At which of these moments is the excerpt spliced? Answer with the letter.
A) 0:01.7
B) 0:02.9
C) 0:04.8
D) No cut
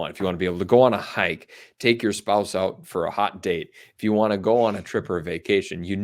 D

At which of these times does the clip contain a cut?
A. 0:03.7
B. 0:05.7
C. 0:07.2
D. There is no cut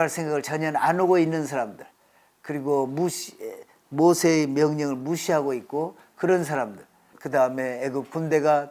C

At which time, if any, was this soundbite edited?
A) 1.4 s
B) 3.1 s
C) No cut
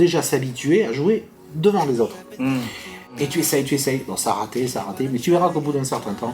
B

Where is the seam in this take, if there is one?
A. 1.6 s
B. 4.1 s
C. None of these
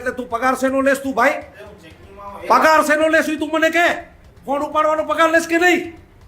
C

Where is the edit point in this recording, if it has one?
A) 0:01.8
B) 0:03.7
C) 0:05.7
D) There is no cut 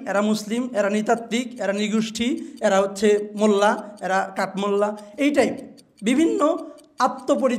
D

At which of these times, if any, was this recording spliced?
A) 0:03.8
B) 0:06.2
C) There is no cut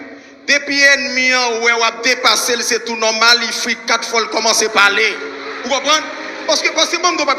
C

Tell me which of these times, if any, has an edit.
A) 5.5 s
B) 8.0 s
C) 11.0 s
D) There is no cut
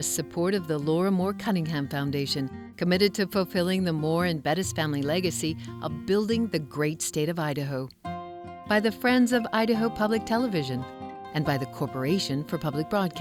D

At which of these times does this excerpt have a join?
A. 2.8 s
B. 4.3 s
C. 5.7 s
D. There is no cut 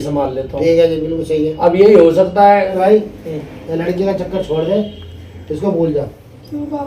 A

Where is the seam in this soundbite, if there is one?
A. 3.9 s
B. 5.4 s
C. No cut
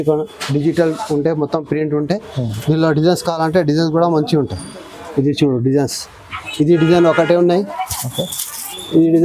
C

